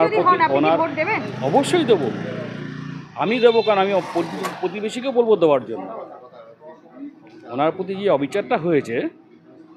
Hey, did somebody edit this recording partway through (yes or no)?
no